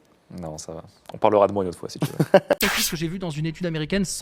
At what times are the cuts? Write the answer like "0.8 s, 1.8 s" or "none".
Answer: none

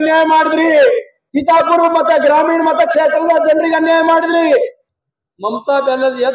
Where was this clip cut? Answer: 4.8 s

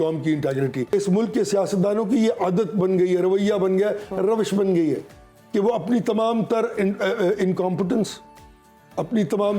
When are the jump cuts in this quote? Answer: 0.9 s

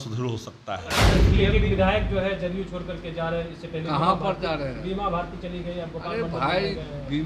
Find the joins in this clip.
1.1 s

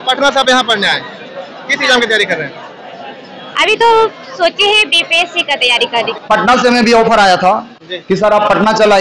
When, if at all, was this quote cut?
6.1 s

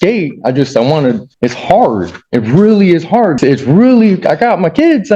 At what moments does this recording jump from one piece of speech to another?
1.3 s, 3.4 s

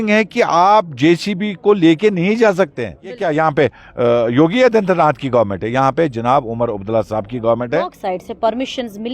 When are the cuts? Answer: 3.2 s, 8.0 s

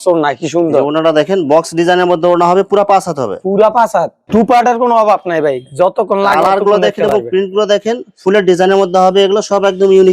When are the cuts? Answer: 4.2 s

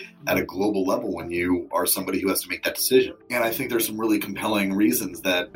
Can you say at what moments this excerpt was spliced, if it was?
none

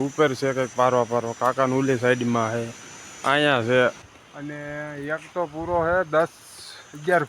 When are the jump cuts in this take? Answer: 4.0 s

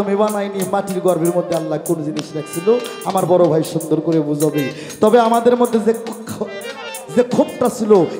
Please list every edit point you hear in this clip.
none

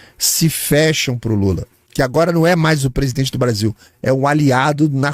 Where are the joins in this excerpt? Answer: 1.8 s

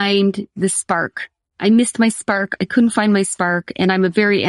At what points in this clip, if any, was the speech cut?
none

